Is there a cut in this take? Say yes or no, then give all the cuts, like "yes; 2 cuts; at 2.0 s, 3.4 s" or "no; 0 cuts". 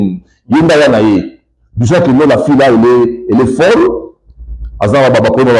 yes; 1 cut; at 2.2 s